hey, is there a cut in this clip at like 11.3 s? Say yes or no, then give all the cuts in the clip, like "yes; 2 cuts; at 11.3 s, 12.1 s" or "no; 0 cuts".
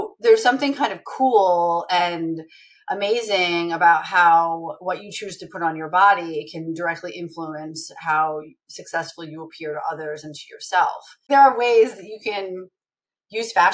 yes; 1 cut; at 11.3 s